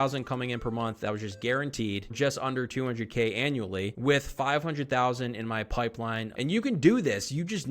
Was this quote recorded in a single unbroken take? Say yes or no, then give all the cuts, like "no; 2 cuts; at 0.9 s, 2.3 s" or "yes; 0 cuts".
no; 2 cuts; at 2.1 s, 6.3 s